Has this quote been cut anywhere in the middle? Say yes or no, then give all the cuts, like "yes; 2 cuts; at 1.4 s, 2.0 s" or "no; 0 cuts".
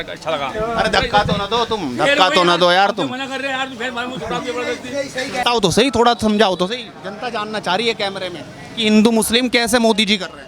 yes; 1 cut; at 5.4 s